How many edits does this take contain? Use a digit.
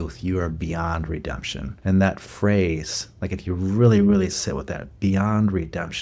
1